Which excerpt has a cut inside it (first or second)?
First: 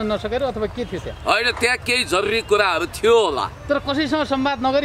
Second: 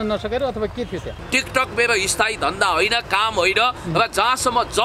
second